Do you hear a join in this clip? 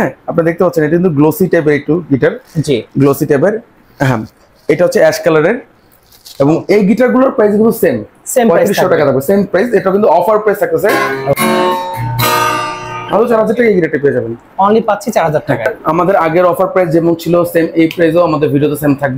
yes; 2 cuts; at 11.1 s, 15.8 s

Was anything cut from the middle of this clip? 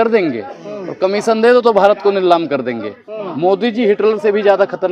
no; 0 cuts

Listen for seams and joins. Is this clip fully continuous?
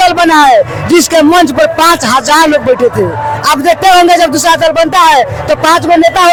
yes; 0 cuts

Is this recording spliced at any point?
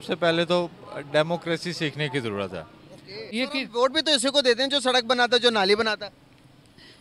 yes; 1 cut; at 3.3 s

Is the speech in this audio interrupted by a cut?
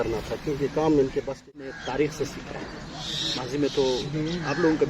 yes; 1 cut; at 1.5 s

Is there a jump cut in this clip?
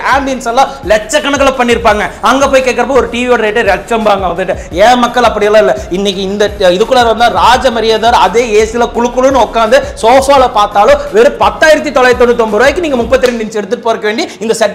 no; 0 cuts

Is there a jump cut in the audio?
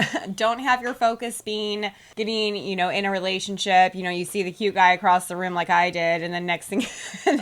no; 0 cuts

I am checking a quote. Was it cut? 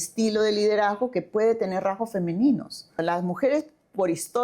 yes; 1 cut; at 3.0 s

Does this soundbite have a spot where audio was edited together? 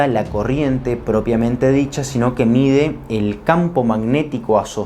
no; 0 cuts

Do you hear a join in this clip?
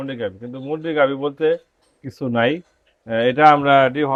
no; 0 cuts

